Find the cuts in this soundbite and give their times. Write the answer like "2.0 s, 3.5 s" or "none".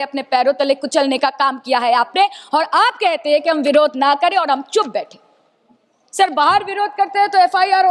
none